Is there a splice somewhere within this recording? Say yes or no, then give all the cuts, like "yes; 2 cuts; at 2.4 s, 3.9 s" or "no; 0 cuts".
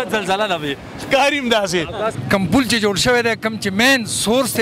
yes; 1 cut; at 2.2 s